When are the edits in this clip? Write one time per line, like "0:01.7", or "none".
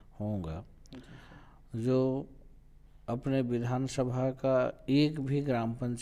none